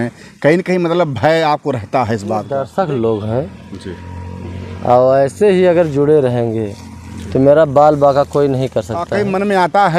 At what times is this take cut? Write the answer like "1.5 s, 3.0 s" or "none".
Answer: 2.6 s, 9.1 s